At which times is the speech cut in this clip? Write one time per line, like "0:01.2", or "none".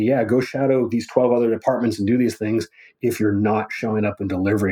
none